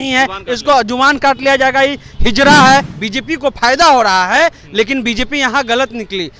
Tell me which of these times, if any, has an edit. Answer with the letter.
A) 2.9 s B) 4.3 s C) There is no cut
A